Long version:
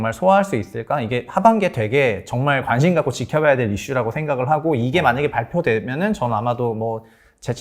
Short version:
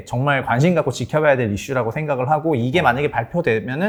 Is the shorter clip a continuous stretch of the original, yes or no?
yes